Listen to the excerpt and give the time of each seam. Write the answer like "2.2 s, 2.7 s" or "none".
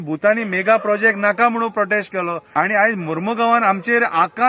2.4 s